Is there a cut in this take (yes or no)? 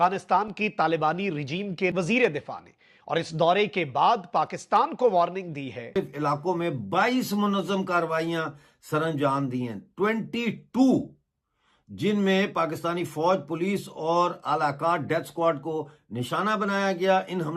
no